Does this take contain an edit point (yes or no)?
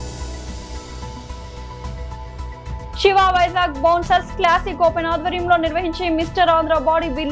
yes